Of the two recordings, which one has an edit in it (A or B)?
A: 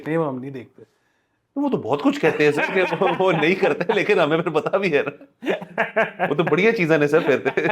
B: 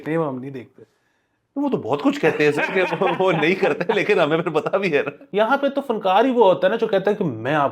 B